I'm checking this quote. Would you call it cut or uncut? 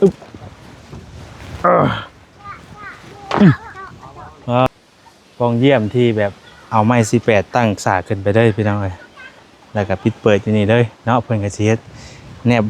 cut